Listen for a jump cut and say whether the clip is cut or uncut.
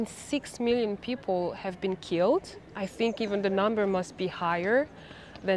uncut